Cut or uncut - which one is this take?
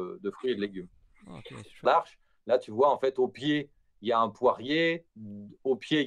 cut